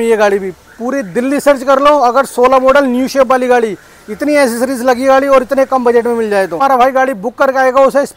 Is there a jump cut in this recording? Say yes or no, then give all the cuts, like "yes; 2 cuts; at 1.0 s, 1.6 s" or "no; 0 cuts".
yes; 1 cut; at 6.6 s